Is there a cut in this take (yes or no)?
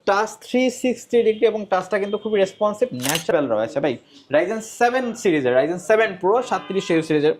yes